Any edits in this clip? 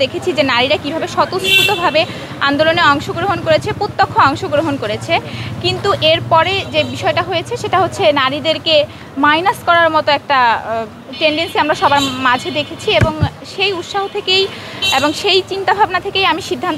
no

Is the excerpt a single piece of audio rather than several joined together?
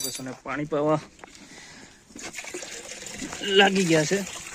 yes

